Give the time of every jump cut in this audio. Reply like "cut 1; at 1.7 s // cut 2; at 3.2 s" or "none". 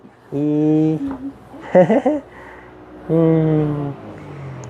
none